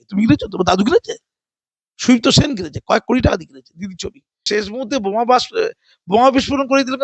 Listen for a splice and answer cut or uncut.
cut